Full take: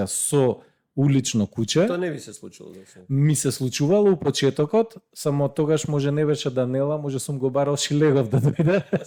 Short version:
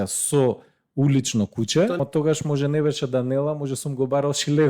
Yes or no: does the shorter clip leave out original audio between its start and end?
yes